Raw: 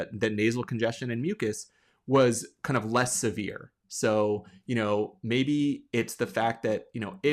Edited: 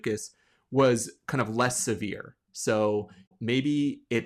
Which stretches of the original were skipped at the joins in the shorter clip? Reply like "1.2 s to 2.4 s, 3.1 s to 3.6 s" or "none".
4.6 s to 5.1 s